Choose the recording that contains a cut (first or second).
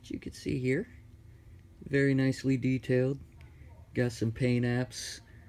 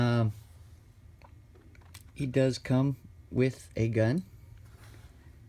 second